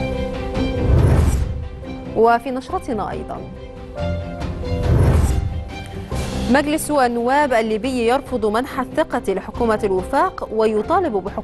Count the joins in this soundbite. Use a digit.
1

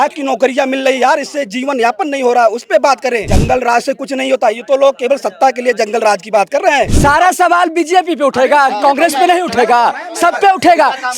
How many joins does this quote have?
2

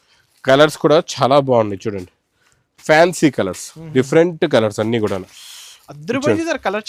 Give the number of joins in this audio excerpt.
0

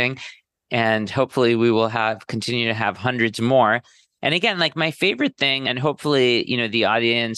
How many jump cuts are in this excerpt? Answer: 1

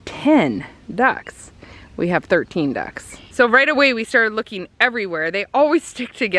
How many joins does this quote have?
0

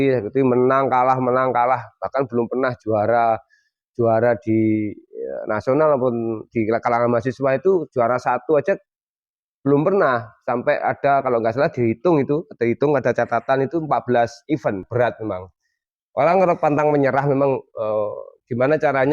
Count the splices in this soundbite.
1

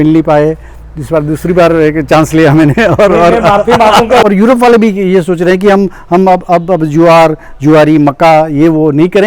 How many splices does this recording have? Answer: 1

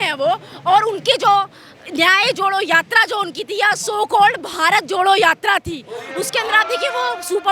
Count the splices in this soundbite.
0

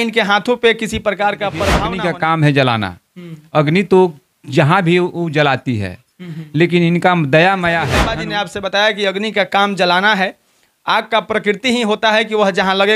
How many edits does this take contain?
2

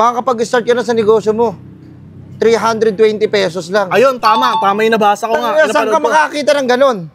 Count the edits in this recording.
0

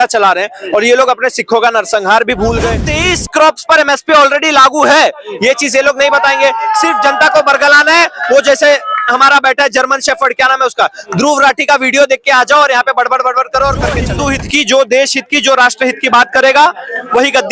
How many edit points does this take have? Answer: 2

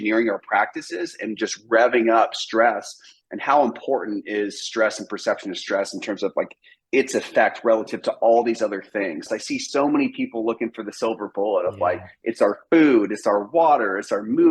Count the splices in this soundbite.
1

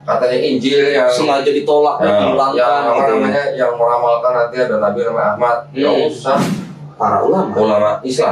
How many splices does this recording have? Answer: 1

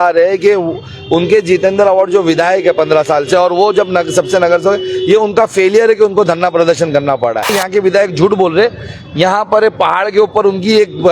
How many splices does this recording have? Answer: 1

